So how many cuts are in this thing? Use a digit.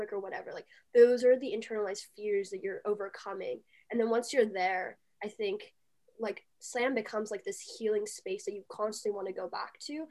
0